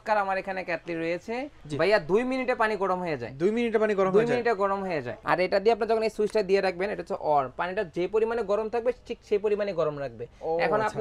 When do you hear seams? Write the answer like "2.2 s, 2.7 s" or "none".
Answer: 1.6 s, 5.1 s